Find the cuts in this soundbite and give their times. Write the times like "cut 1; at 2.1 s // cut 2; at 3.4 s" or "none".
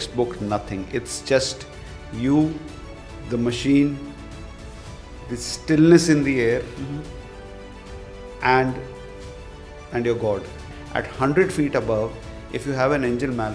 cut 1; at 10.6 s